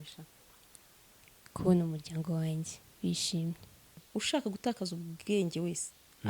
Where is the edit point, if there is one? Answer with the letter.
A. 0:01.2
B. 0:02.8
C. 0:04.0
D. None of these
C